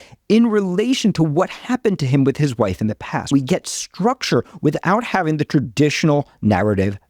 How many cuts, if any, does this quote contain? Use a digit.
1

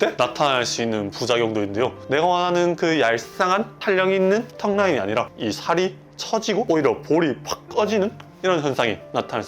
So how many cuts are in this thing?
1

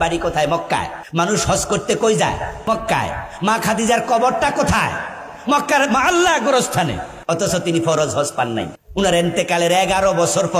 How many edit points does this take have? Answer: 4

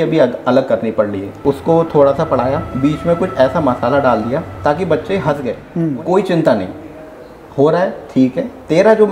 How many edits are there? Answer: 2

